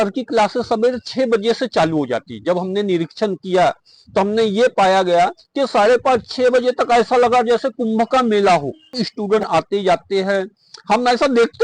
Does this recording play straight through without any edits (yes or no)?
no